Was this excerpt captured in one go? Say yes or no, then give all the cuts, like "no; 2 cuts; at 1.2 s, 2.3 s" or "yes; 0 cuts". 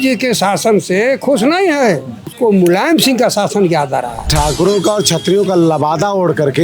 no; 2 cuts; at 2.3 s, 4.3 s